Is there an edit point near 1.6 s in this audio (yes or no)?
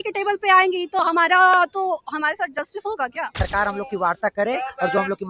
no